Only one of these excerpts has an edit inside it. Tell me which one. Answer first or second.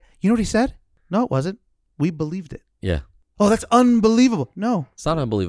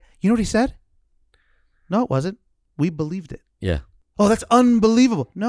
first